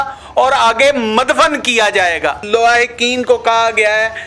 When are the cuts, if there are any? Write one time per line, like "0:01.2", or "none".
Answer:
0:02.4